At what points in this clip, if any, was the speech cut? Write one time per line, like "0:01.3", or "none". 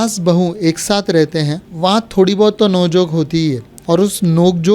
0:01.6
0:03.7